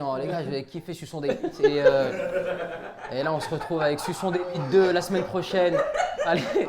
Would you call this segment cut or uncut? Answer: uncut